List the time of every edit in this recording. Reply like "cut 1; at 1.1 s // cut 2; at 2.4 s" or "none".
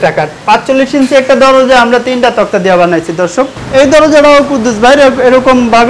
cut 1; at 3.6 s